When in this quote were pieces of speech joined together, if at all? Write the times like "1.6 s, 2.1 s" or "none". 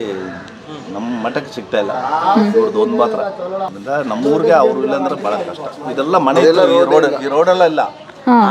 3.7 s